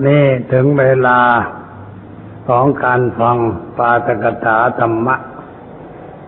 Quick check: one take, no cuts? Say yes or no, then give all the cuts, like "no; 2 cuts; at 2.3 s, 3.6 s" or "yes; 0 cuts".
yes; 0 cuts